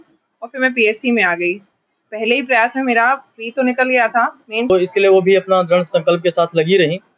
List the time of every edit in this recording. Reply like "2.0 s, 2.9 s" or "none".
4.7 s